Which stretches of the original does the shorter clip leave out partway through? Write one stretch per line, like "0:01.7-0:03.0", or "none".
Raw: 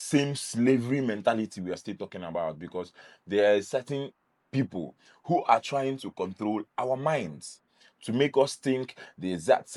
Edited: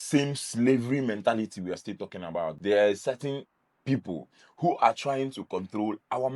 0:02.6-0:03.2